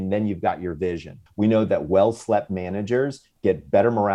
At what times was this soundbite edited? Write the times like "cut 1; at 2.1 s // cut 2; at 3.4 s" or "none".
cut 1; at 1.2 s // cut 2; at 3.3 s